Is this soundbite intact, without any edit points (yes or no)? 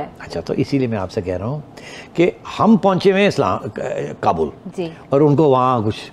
yes